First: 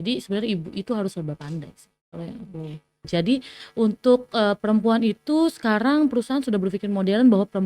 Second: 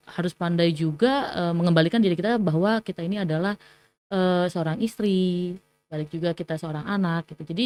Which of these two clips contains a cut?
first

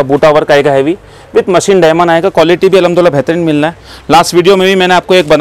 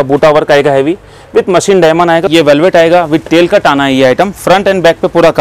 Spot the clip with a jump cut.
second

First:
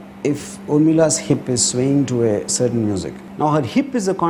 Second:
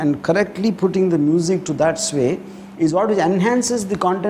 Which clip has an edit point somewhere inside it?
first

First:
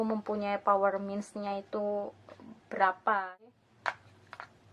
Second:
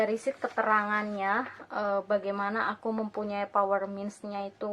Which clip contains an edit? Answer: first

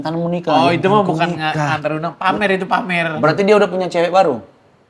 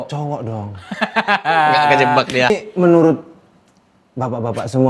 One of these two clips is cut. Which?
second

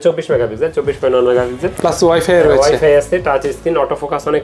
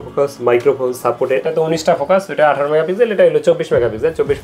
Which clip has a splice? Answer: second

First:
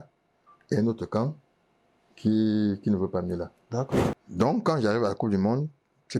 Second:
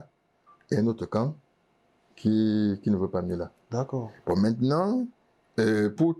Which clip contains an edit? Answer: first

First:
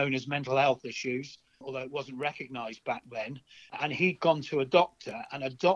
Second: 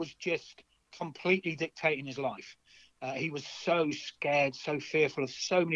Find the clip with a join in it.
first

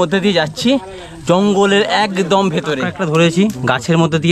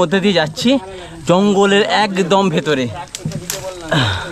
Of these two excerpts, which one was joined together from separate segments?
first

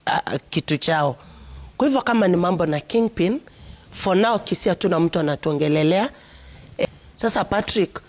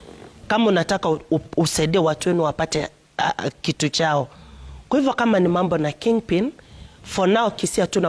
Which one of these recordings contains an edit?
first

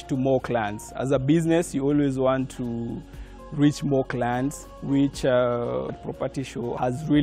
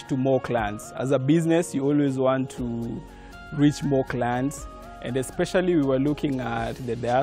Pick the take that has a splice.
first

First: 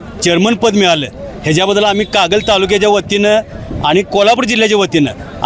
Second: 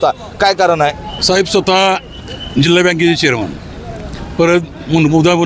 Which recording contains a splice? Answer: second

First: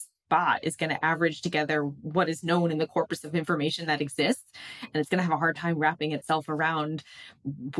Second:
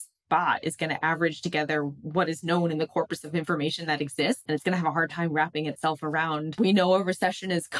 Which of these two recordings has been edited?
second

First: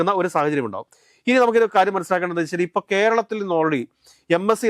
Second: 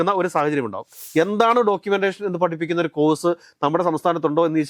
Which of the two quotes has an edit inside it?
second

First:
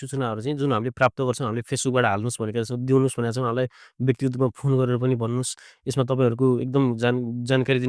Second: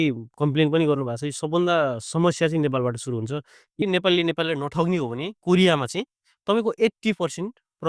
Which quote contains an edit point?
second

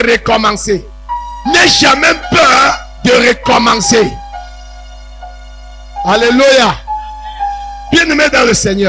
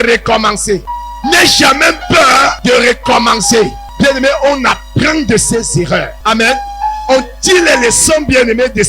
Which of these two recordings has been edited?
second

